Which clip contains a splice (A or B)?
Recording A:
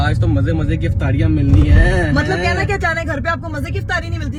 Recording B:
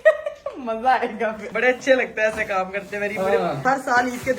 B